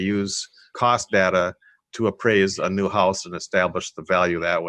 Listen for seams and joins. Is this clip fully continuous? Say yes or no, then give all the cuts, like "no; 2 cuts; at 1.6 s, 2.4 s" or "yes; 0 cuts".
yes; 0 cuts